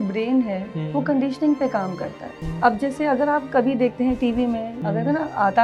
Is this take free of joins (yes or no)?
no